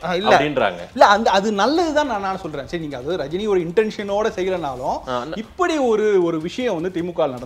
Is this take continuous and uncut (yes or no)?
yes